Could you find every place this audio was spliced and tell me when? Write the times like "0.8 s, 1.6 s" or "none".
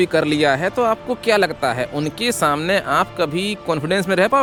none

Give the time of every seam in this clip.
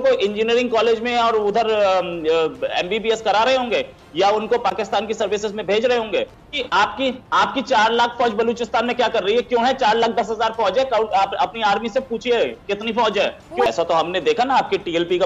6.5 s, 13.7 s

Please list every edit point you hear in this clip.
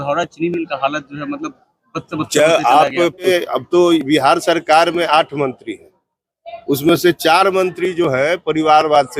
3.3 s

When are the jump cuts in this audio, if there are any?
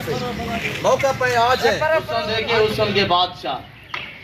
2.3 s

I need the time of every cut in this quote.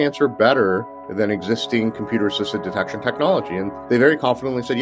3.8 s

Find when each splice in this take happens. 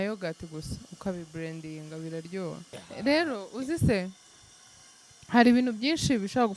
2.8 s

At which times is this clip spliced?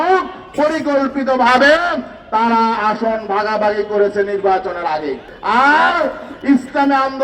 5.3 s

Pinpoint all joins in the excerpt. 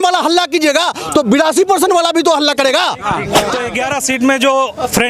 3.6 s

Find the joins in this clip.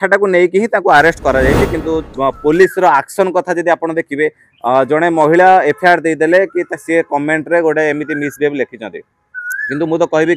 2.0 s

